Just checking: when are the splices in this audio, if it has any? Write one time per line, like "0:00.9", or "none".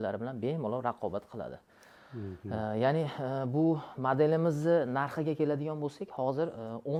none